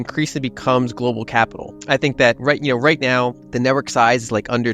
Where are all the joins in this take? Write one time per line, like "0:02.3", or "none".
0:01.7
0:03.4